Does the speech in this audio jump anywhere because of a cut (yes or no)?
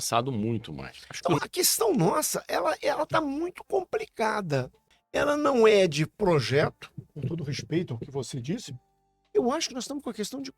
yes